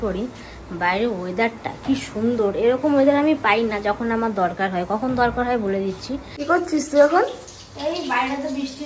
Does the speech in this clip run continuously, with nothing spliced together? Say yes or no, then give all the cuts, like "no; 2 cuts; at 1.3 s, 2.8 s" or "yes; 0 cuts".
no; 1 cut; at 6.4 s